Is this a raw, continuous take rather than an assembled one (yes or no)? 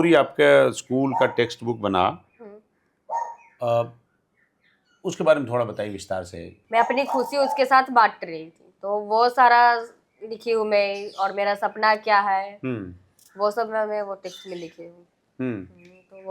no